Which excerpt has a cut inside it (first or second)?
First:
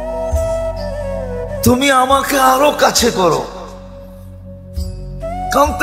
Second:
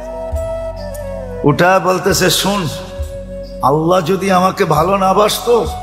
first